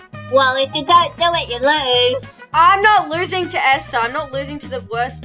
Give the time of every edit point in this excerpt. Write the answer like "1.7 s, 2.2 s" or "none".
2.3 s